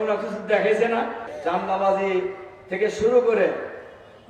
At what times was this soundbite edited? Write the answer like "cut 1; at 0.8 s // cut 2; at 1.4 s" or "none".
cut 1; at 1.2 s